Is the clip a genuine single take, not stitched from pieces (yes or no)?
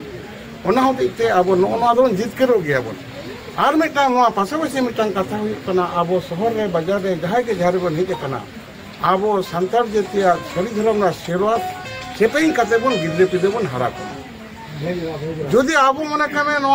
yes